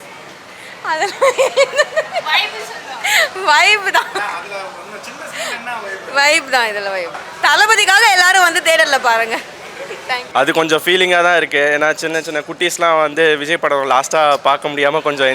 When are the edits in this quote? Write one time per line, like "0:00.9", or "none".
0:07.2
0:10.2

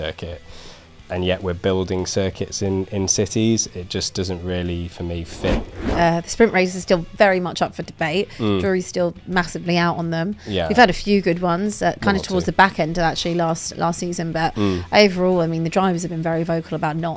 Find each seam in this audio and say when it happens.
0:05.8

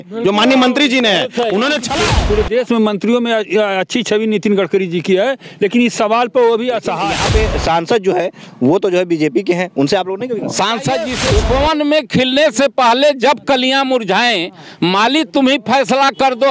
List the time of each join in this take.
0:01.9
0:07.2
0:11.2

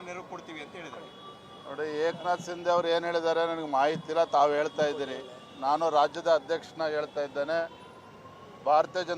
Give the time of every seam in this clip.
0:07.8

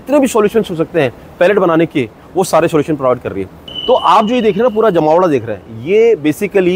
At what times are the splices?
0:03.7

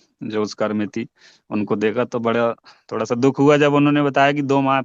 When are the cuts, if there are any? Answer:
none

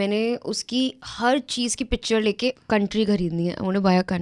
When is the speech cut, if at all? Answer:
0:02.6

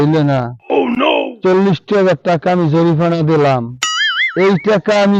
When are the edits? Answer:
none

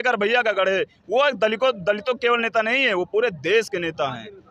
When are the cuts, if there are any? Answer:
none

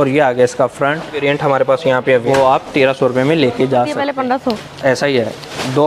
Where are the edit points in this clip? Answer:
0:01.2
0:02.2
0:04.0

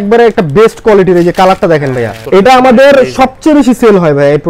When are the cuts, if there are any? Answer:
0:02.1

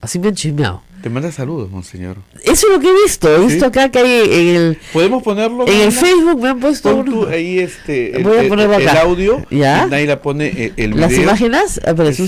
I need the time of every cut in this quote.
none

